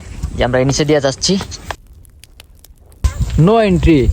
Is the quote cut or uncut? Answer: cut